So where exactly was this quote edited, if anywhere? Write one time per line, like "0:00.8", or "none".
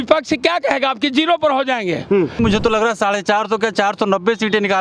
0:02.4

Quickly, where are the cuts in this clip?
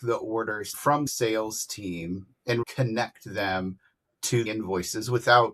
0:01.1
0:02.7
0:04.5

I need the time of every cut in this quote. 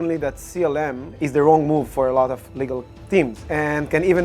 0:01.2
0:03.4

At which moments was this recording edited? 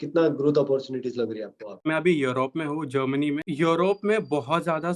0:01.9
0:03.4

